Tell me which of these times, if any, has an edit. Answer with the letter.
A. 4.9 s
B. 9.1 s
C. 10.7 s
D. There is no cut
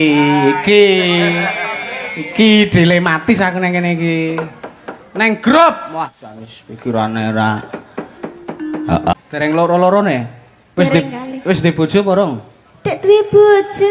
B